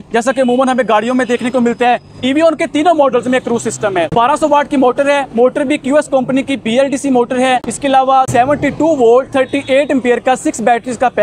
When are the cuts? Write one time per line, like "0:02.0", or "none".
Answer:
0:04.1